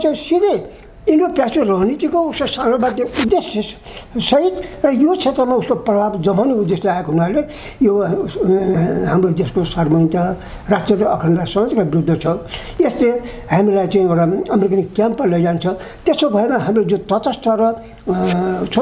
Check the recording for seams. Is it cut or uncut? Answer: uncut